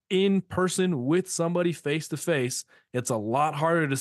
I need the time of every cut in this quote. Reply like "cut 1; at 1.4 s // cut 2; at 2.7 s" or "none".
none